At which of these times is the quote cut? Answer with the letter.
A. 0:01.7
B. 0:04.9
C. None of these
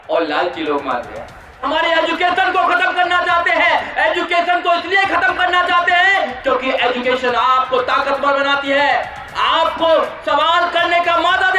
A